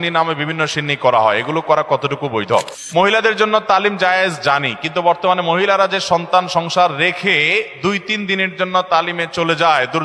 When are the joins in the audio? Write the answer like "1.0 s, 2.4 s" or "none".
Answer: 2.8 s